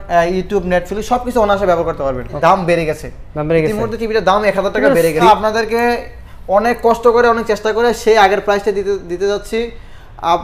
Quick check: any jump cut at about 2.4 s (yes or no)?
yes